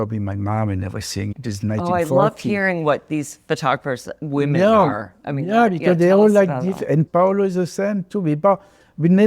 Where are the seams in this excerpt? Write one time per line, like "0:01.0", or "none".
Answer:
0:01.3